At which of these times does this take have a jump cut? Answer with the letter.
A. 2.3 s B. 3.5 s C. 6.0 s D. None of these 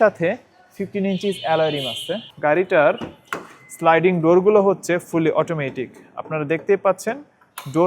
A